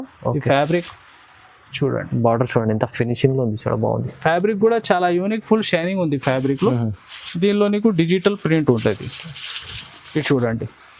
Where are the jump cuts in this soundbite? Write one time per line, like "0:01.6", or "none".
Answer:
none